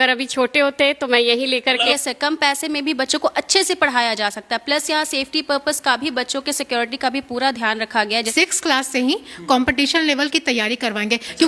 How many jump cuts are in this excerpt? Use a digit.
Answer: 2